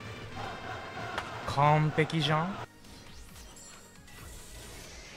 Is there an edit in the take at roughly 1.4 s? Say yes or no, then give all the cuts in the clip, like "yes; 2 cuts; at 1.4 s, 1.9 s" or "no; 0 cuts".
no; 1 cut; at 2.7 s